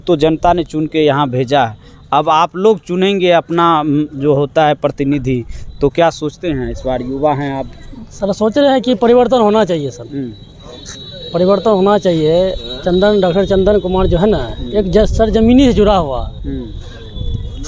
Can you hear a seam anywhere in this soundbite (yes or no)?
no